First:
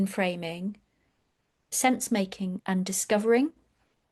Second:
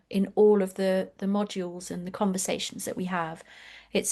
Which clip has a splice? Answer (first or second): first